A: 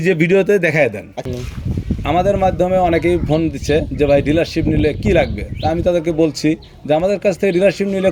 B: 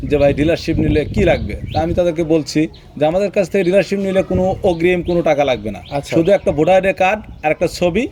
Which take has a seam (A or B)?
A